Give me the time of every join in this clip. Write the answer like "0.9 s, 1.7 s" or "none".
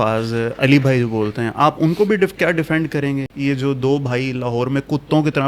3.3 s

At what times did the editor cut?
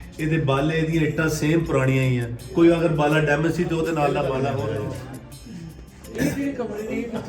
4.7 s

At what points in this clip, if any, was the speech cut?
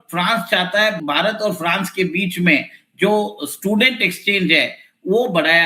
1.0 s

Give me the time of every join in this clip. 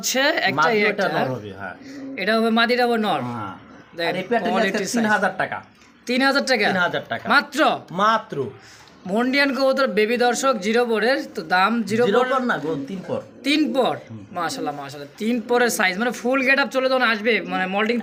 none

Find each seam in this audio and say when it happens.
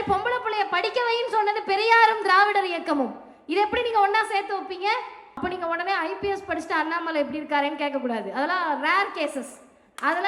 5.4 s

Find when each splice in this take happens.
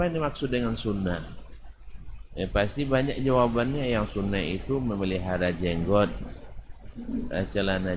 none

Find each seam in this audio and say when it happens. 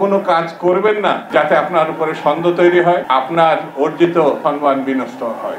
1.2 s, 3.0 s, 4.4 s

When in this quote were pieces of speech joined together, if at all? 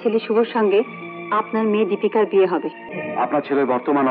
2.8 s

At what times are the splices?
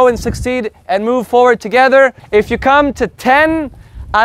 2.2 s

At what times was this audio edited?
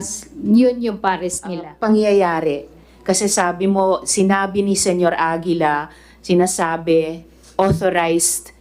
1.6 s

